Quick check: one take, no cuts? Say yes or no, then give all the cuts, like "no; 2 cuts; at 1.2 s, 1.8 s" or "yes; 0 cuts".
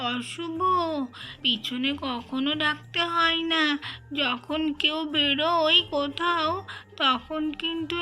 no; 1 cut; at 1.3 s